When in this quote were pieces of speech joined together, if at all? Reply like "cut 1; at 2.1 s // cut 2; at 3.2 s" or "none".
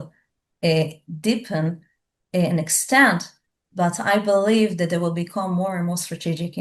none